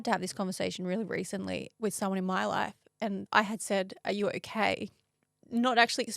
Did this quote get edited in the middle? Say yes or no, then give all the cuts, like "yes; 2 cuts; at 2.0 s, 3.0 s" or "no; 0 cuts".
yes; 1 cut; at 1.7 s